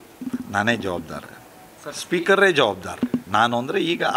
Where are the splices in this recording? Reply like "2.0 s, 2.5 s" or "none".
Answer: none

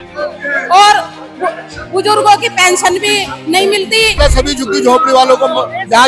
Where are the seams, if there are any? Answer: 4.2 s

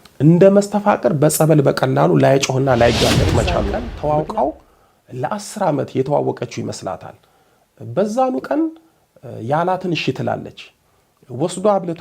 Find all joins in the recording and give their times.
3.8 s

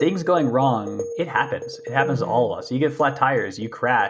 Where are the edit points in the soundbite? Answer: 1.1 s

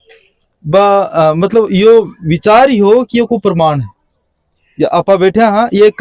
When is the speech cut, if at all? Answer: none

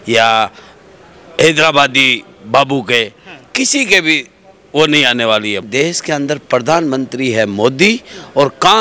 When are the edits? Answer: 5.7 s

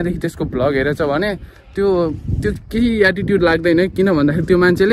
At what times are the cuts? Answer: none

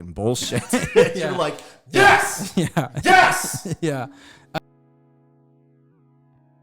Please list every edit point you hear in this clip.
4.6 s

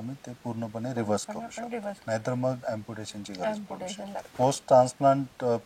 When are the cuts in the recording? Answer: 2.0 s, 2.6 s, 4.3 s

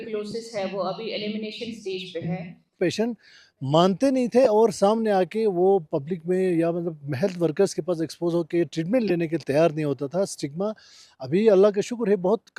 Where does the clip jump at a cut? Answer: 2.7 s

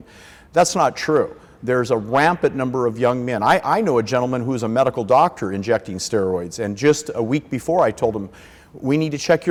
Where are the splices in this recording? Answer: none

